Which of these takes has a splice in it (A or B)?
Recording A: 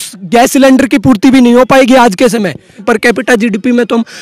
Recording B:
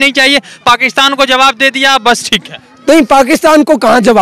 A